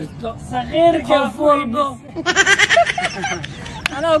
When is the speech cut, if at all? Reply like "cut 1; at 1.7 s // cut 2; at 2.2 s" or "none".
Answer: none